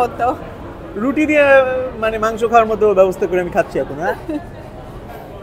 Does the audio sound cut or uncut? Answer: uncut